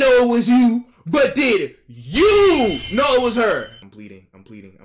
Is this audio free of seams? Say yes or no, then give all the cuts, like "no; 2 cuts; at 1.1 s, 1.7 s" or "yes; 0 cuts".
yes; 0 cuts